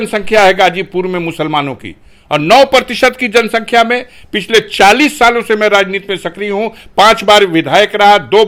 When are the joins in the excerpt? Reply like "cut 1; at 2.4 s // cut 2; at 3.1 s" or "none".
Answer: none